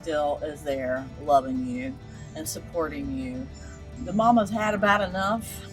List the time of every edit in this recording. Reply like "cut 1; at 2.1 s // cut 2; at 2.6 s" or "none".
cut 1; at 3.9 s